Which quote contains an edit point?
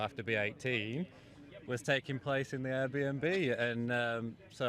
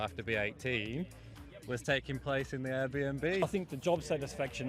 second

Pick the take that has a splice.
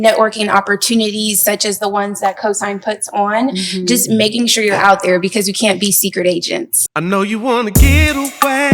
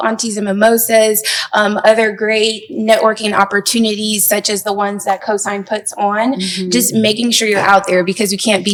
first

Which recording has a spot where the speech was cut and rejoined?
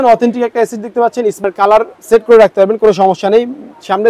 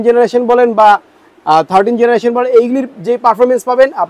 first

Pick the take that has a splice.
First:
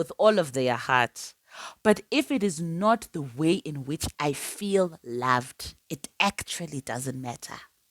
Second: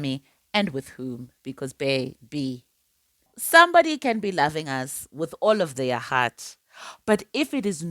second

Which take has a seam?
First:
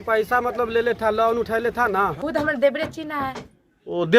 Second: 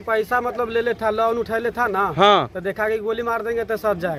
first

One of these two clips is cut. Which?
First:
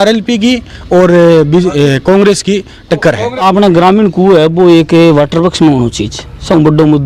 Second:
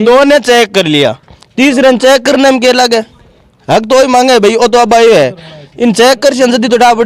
first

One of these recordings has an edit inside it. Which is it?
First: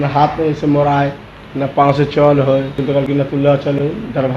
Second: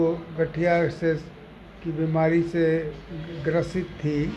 first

